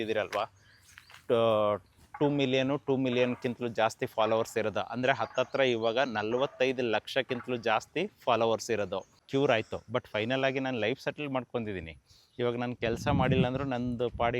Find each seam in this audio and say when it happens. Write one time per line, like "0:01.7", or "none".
0:09.2